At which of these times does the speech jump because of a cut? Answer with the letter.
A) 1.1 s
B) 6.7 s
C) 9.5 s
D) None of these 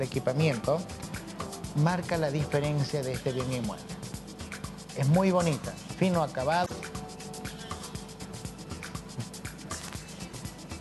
B